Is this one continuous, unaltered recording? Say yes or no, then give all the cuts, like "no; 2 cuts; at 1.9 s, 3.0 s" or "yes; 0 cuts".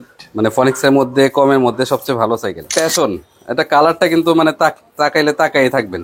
no; 1 cut; at 2.7 s